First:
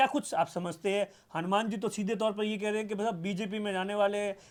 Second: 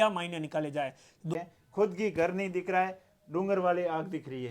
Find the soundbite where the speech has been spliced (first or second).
second